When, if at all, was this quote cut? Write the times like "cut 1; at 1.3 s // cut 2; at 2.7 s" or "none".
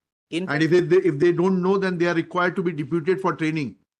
none